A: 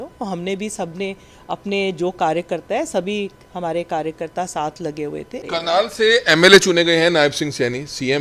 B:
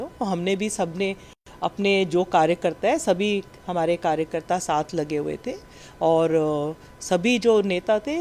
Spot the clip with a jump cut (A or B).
A